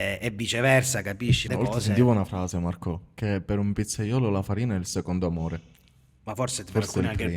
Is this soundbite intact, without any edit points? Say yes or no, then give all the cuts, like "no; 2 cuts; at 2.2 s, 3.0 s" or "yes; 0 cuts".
no; 1 cut; at 1.4 s